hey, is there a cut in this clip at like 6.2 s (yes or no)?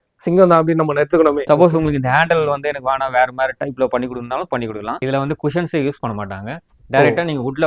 no